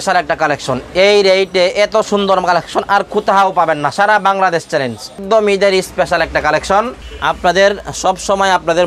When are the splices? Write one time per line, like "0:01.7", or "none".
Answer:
0:05.2
0:07.1